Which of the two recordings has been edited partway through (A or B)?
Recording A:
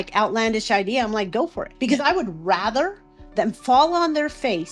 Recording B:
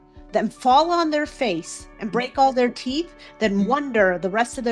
A